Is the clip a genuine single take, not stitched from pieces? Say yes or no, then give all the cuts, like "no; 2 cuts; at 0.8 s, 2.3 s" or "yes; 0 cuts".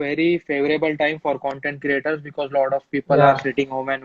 yes; 0 cuts